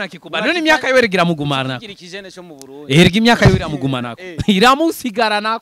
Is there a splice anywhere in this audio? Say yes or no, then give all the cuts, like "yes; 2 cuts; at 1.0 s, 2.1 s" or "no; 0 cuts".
no; 0 cuts